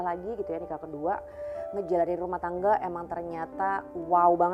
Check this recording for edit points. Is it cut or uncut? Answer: uncut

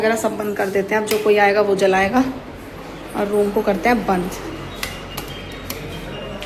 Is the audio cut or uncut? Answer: uncut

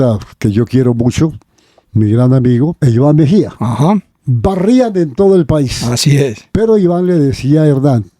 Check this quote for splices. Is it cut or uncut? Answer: cut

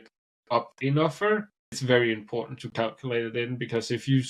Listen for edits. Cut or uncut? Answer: cut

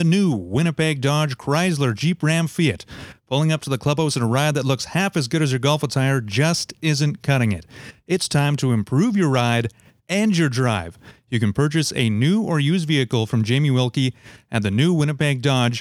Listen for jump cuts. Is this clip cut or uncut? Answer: uncut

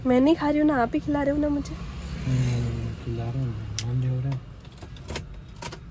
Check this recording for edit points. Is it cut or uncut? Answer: uncut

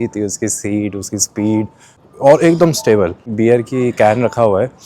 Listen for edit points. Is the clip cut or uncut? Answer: cut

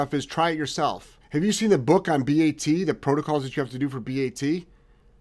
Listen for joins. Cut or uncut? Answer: cut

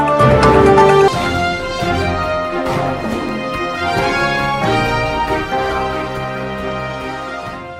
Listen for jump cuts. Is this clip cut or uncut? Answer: uncut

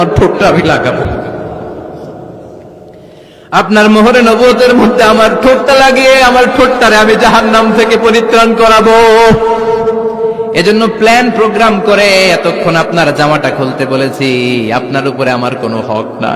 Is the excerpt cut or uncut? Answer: cut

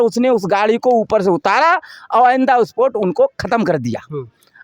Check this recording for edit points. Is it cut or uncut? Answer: uncut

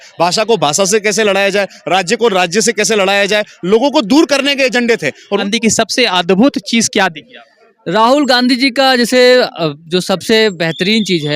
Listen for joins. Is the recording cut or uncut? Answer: cut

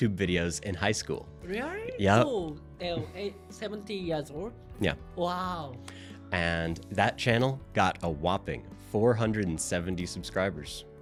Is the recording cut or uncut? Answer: uncut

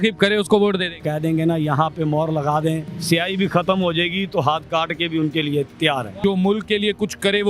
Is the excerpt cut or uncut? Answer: cut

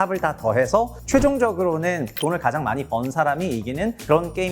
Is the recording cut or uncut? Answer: cut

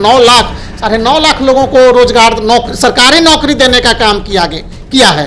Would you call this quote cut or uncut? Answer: uncut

